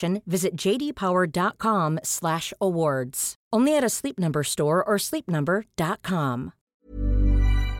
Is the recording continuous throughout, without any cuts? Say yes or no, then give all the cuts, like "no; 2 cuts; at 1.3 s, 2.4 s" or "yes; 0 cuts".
no; 1 cut; at 6.6 s